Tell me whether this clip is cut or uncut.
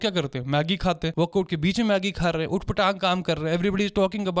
uncut